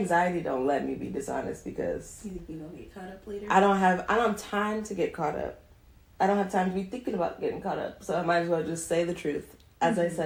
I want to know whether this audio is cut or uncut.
uncut